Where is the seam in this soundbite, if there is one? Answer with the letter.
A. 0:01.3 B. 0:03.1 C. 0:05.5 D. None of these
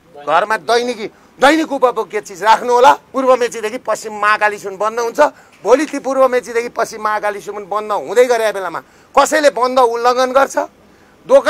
B